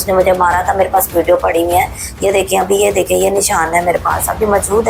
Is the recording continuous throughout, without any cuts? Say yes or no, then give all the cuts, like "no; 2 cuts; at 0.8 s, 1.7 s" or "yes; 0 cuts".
yes; 0 cuts